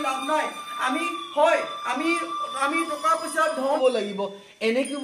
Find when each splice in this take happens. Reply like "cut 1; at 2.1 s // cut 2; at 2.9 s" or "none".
cut 1; at 3.8 s

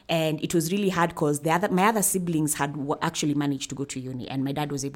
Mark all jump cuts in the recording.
none

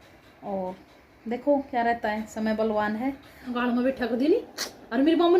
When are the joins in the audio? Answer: cut 1; at 3.5 s

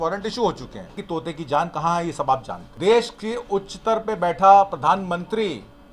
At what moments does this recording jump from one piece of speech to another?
cut 1; at 1.0 s // cut 2; at 2.6 s

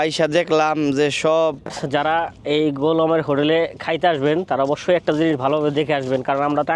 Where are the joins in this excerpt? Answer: cut 1; at 1.8 s

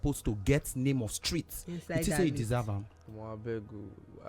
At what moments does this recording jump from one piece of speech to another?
cut 1; at 3.0 s

